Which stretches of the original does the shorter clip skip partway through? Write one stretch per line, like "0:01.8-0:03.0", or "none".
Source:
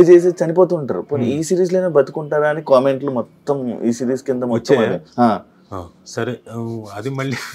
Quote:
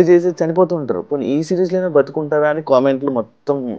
none

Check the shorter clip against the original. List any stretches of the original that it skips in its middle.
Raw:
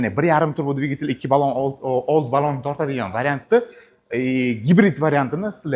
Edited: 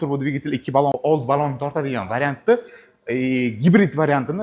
0:01.5-0:02.0

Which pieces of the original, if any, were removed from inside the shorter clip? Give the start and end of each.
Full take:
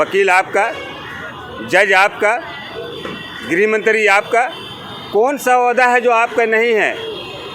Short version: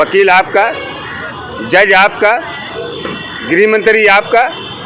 none

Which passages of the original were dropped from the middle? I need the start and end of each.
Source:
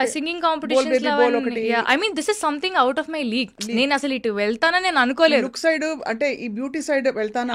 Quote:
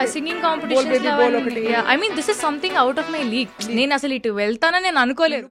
none

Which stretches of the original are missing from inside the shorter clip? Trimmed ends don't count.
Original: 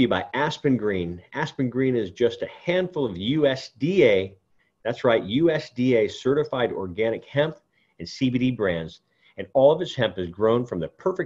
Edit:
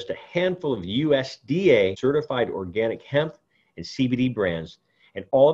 0:04.3-0:06.2

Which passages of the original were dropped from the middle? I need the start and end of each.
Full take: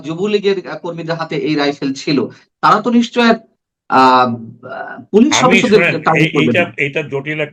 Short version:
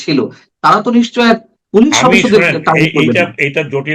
0:03.5-0:04.9

